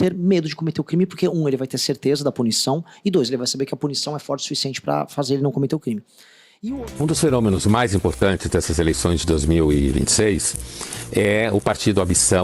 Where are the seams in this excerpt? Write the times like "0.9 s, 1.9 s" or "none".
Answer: 6.6 s